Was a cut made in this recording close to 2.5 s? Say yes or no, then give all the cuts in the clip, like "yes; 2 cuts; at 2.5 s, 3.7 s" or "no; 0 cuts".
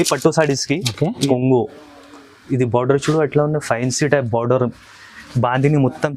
no; 1 cut; at 1.2 s